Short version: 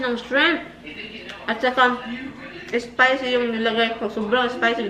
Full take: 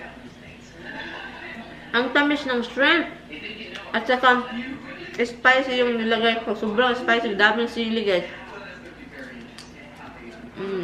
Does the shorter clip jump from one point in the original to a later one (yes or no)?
no